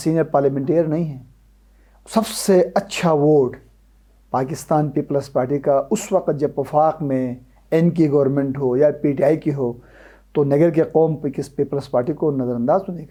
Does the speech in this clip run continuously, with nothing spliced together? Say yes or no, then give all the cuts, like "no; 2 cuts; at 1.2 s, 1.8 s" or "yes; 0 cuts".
yes; 0 cuts